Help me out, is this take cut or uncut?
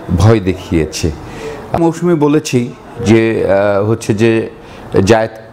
cut